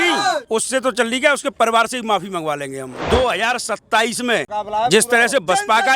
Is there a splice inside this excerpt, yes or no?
yes